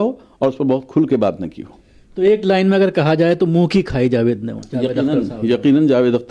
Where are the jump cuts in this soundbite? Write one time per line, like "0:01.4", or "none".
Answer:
none